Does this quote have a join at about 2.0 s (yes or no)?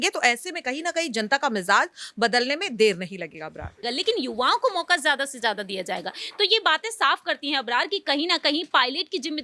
no